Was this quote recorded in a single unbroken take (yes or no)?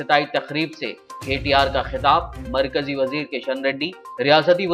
yes